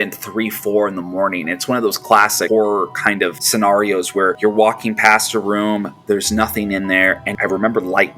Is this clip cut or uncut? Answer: cut